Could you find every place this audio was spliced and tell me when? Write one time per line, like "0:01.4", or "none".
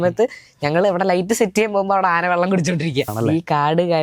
0:03.1